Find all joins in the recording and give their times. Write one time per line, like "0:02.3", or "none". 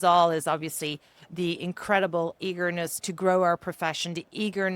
0:03.0